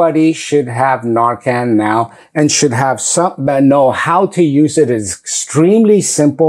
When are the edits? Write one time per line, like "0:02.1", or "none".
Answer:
none